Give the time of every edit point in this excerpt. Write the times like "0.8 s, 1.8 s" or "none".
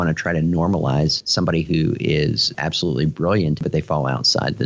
3.6 s